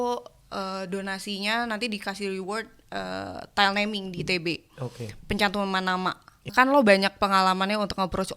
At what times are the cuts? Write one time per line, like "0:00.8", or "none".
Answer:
0:06.5